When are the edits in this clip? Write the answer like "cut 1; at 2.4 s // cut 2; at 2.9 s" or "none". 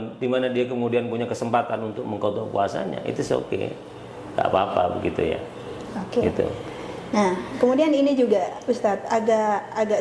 none